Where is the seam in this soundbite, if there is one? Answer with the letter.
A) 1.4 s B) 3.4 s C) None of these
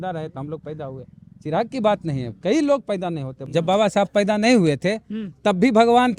B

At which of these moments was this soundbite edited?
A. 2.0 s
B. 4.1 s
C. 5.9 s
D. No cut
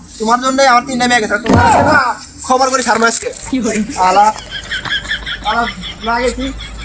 D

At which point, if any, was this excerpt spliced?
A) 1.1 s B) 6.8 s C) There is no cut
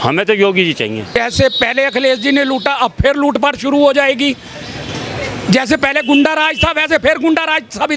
A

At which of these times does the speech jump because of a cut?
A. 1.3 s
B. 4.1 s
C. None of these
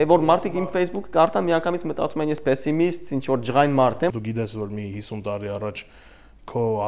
B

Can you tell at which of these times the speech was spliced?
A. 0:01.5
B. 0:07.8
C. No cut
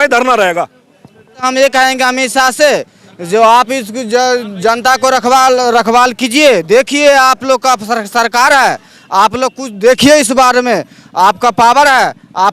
A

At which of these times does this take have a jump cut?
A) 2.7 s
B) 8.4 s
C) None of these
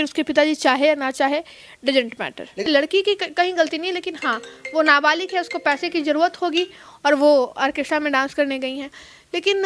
A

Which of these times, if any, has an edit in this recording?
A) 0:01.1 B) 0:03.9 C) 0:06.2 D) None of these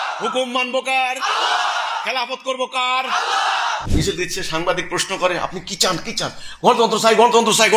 B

